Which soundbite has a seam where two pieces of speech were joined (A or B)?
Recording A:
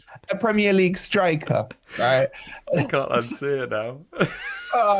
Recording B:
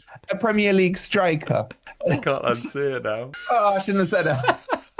B